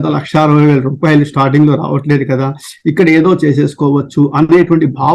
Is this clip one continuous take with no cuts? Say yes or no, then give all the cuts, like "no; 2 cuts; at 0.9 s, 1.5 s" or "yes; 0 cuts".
yes; 0 cuts